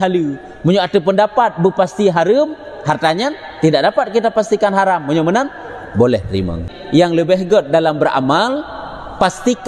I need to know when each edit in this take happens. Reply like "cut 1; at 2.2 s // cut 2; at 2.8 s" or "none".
cut 1; at 6.7 s